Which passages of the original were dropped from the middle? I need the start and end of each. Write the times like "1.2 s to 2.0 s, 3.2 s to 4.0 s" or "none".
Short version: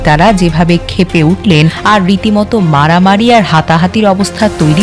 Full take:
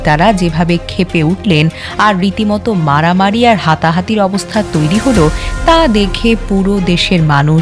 1.8 s to 1.9 s